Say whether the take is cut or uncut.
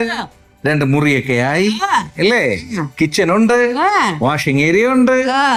uncut